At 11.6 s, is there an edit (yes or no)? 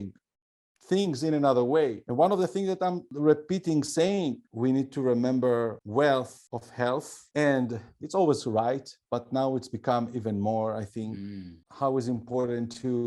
no